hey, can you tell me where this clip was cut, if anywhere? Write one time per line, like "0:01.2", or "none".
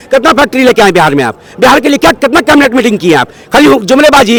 none